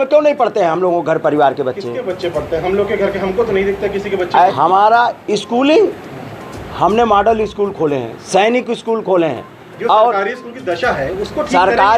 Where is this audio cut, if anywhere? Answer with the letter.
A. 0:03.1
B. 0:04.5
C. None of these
B